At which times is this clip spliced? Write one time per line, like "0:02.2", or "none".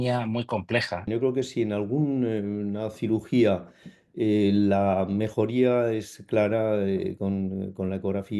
0:01.1